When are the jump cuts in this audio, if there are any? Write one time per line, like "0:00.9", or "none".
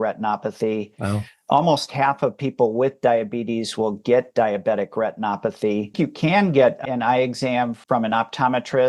0:05.9

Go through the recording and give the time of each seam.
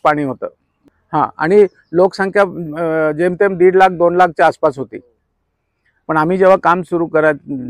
none

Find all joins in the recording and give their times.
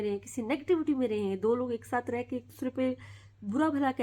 none

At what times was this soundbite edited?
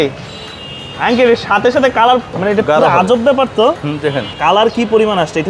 0:02.3
0:04.3

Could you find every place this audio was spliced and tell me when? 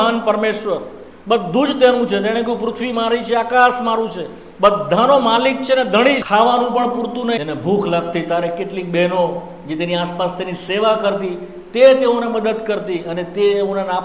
0:06.2
0:07.4

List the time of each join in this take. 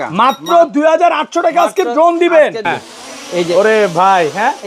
0:02.6

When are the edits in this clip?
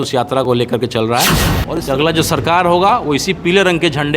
0:01.6

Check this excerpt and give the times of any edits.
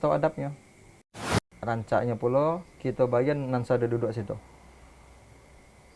0:01.4

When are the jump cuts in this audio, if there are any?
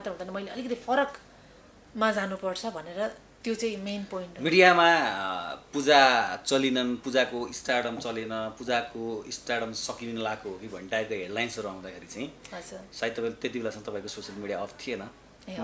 none

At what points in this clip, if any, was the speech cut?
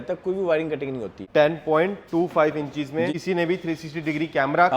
0:01.2
0:03.1

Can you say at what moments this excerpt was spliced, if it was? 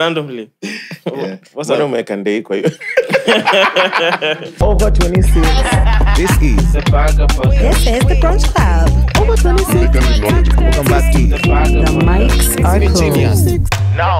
0:04.6

